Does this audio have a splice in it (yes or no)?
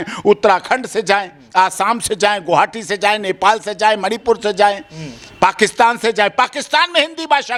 no